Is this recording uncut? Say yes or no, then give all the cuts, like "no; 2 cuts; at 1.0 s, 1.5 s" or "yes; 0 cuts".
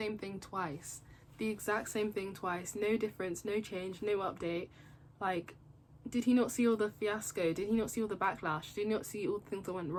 yes; 0 cuts